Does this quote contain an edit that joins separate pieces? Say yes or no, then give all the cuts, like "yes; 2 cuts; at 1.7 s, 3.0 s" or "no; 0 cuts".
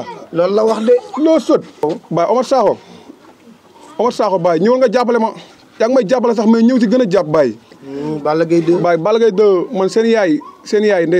yes; 1 cut; at 1.8 s